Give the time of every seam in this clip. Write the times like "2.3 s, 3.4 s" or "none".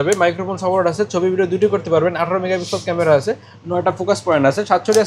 none